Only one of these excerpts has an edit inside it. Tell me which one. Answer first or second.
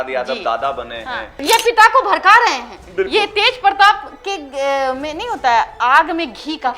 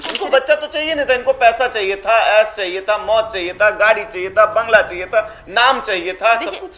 first